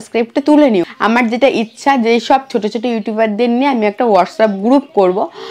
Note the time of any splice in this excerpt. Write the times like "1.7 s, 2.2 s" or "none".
0.9 s

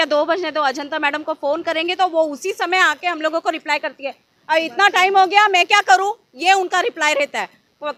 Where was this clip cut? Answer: none

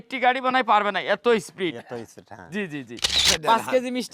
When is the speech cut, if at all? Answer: 3.2 s

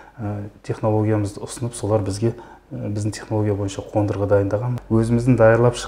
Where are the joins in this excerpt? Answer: 4.7 s

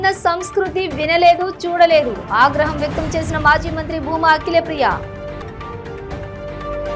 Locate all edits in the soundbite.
none

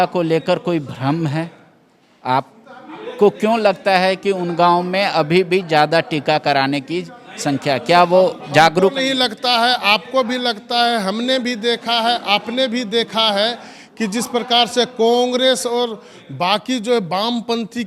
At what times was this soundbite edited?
none

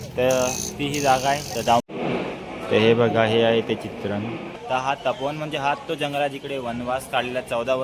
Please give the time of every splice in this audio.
1.8 s, 4.5 s

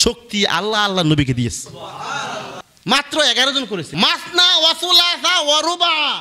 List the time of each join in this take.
2.6 s, 3.9 s

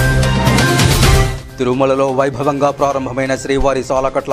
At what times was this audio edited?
1.4 s

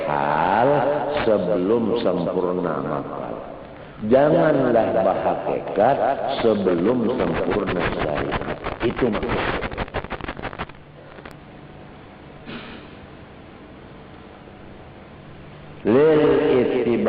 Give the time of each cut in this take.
11.3 s

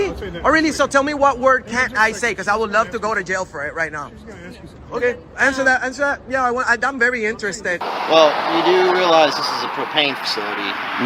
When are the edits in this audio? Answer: 7.8 s

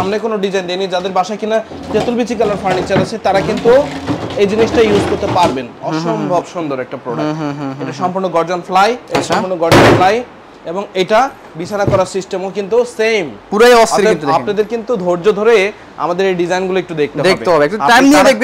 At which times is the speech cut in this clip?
none

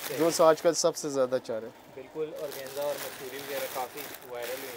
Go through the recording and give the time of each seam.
none

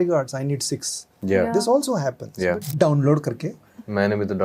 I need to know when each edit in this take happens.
2.7 s

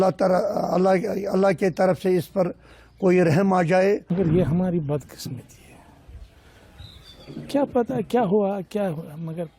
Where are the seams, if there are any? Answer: 4.1 s

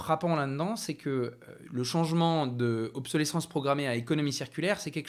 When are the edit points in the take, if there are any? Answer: none

